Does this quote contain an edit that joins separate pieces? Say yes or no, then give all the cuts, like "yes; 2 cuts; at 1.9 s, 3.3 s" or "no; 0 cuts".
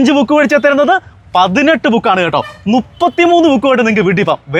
no; 0 cuts